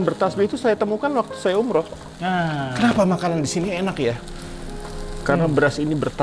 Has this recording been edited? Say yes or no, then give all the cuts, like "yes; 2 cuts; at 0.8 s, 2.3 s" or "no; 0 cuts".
no; 0 cuts